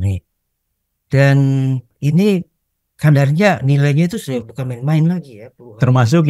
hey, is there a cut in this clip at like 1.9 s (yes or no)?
yes